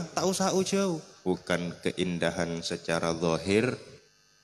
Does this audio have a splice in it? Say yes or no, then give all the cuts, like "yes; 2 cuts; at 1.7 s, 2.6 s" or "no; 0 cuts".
yes; 1 cut; at 1.1 s